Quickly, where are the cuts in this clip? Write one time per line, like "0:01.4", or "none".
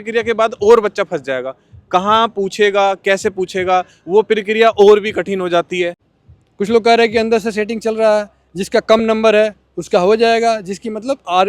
0:06.0